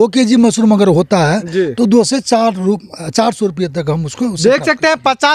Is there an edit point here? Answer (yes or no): no